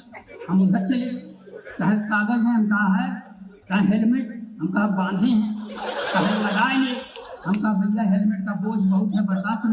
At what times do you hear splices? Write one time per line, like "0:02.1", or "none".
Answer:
none